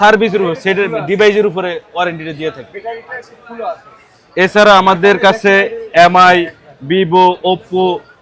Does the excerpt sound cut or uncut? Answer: uncut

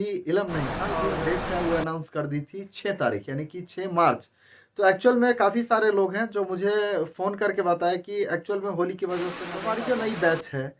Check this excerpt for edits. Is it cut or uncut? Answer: cut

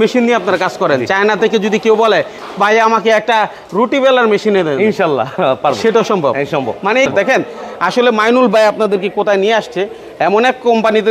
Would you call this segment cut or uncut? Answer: uncut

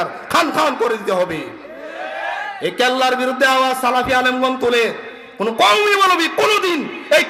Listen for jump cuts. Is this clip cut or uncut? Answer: uncut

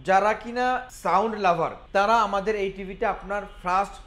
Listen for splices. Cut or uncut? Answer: cut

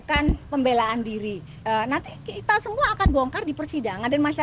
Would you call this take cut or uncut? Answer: cut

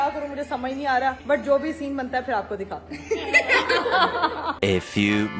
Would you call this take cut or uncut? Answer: uncut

